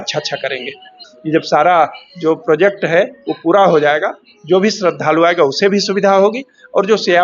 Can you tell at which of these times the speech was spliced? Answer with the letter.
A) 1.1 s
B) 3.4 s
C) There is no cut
A